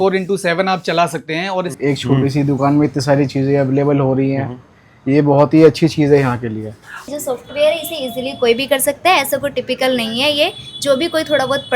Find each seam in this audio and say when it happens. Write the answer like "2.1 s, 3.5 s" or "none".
1.7 s, 7.0 s